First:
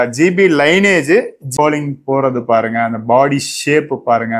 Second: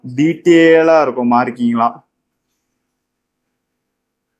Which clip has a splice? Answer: first; 1 cut; at 1.4 s

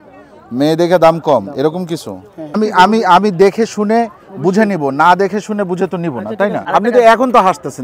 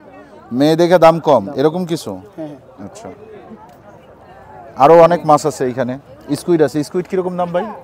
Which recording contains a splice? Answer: first; 2 cuts; at 2.6 s, 6.6 s

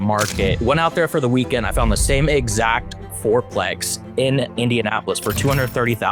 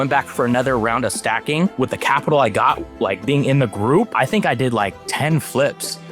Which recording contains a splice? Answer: second; 2 cuts; at 1.7 s, 4.1 s

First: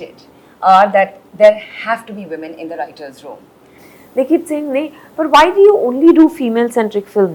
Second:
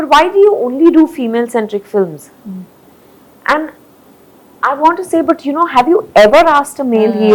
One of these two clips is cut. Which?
first; 1 cut; at 3.8 s

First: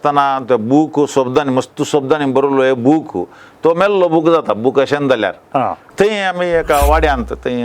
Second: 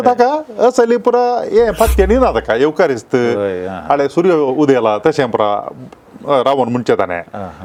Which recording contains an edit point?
first; 1 cut; at 5.8 s

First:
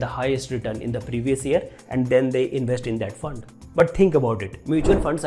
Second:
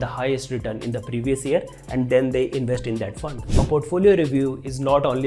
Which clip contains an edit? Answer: second; 1 cut; at 3.5 s

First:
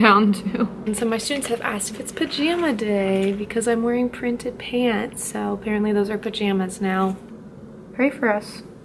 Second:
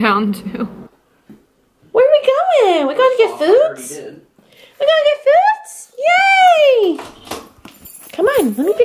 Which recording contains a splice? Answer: first; 2 cuts; at 0.9 s, 7.5 s

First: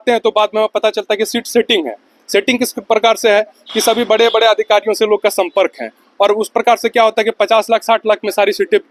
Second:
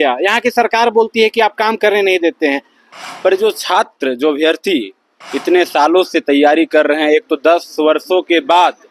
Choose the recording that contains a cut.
second; 1 cut; at 2.8 s

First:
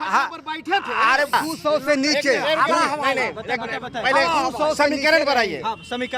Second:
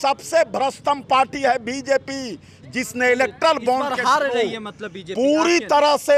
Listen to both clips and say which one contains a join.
first; 1 cut; at 1.3 s

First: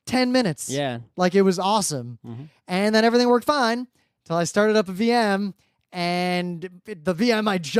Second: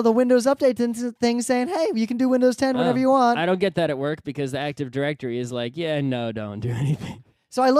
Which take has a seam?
second; 1 cut; at 5.7 s

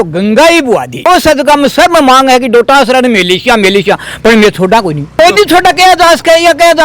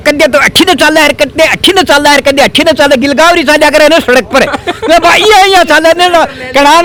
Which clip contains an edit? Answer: first; 2 cuts; at 1.1 s, 5.1 s

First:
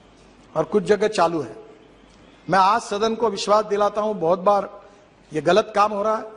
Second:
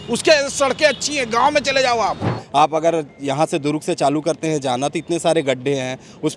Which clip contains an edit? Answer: second; 1 cut; at 2.4 s

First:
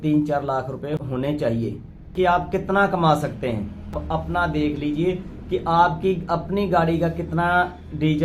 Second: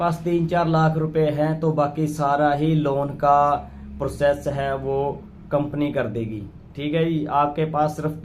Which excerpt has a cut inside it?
first; 3 cuts; at 1.1 s, 2.1 s, 4.0 s

